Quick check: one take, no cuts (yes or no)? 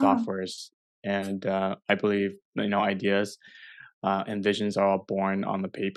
yes